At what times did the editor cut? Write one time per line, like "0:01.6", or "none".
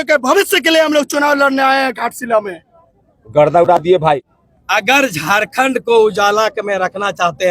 0:04.4